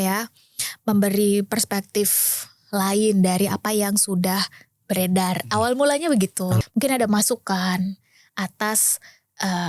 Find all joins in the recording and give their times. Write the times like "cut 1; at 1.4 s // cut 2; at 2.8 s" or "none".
cut 1; at 6.6 s